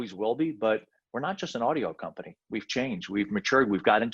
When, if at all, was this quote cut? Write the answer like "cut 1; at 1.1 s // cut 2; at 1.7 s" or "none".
none

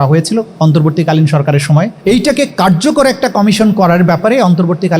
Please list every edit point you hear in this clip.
cut 1; at 2.0 s

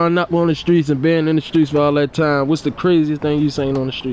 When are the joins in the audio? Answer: none

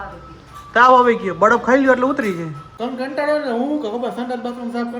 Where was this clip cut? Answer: cut 1; at 2.7 s

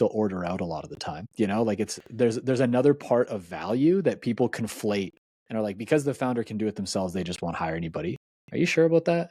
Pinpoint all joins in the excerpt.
none

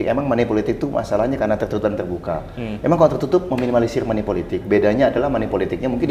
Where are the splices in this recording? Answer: none

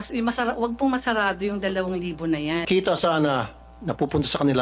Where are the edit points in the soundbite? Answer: cut 1; at 2.7 s

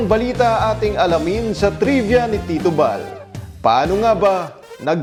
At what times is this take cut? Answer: none

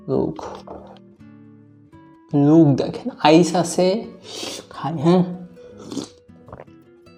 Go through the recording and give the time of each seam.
none

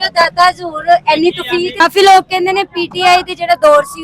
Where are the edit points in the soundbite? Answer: cut 1; at 1.7 s

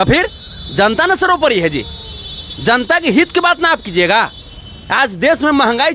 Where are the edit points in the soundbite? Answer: none

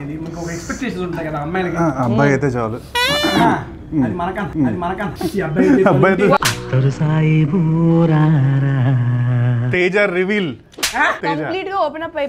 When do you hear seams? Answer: cut 1; at 5.0 s // cut 2; at 9.5 s // cut 3; at 11.2 s

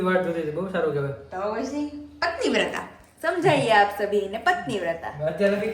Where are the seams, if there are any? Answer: none

